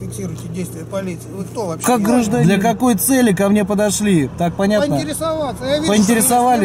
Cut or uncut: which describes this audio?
cut